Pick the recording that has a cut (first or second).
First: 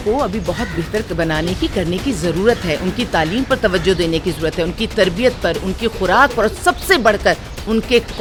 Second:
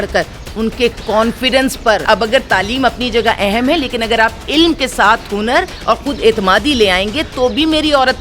second